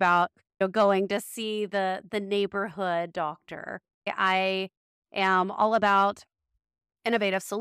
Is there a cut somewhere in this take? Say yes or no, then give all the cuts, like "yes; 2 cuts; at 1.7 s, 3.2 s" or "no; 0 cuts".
yes; 1 cut; at 4.1 s